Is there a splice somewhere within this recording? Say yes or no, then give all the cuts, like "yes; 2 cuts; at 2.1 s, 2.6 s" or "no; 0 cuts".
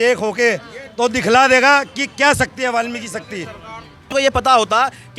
yes; 1 cut; at 4.1 s